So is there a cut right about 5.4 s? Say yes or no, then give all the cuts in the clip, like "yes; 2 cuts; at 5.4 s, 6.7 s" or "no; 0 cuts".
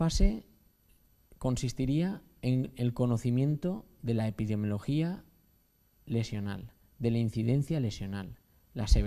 no; 1 cut; at 2.2 s